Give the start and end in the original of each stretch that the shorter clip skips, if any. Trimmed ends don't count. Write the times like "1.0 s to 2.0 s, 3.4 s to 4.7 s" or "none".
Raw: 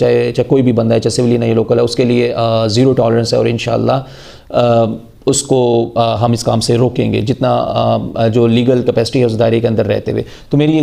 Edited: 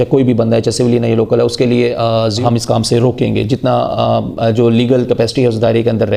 2.8 s to 6.2 s